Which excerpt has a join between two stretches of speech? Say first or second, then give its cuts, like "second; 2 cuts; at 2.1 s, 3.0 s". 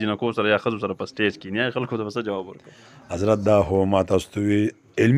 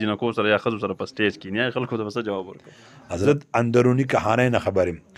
second; 1 cut; at 3.3 s